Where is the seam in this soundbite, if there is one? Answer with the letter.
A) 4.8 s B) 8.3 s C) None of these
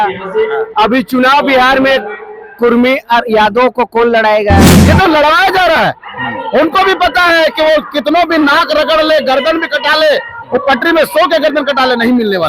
A